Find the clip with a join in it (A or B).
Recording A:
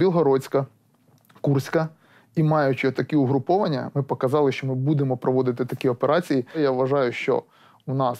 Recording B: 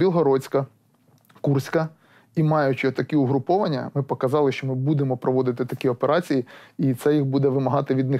A